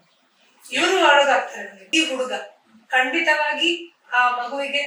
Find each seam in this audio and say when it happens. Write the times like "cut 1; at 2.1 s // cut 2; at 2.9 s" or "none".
cut 1; at 1.7 s